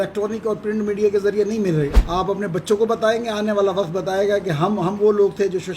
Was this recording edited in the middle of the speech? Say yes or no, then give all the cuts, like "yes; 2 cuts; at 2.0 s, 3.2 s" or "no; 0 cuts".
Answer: yes; 1 cut; at 2.0 s